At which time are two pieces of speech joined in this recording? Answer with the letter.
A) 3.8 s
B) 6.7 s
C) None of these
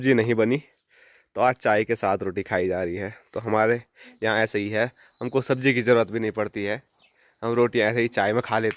C